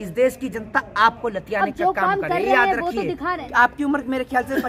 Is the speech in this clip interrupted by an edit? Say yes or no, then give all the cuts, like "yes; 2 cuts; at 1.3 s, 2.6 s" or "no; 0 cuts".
yes; 1 cut; at 3.4 s